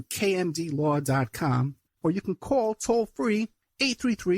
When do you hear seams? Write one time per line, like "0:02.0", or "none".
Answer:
0:01.9

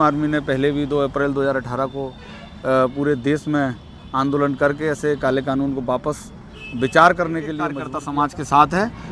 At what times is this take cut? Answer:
0:07.9

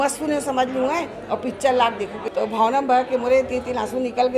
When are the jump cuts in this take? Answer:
0:02.2

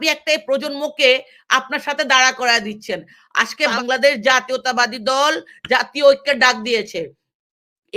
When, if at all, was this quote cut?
0:03.7

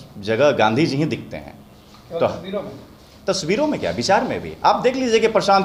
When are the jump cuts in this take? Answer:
none

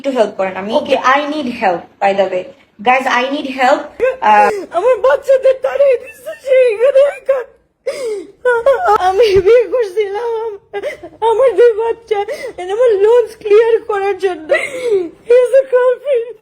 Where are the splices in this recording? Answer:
0:04.6
0:09.0
0:14.4

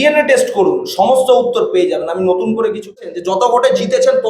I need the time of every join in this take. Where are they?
0:03.4

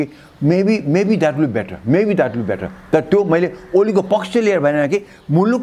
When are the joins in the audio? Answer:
none

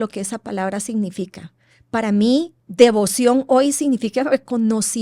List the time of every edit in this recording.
0:02.6

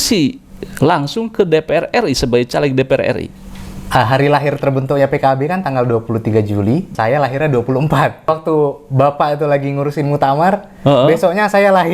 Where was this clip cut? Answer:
0:03.3
0:06.9
0:08.3

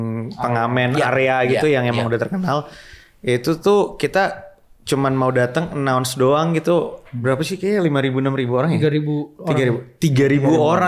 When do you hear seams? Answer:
none

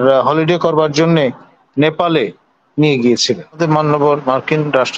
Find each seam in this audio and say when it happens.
0:03.6

